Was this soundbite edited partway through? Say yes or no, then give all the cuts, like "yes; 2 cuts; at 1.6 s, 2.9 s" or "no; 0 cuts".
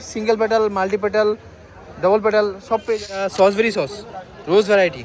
yes; 1 cut; at 3.3 s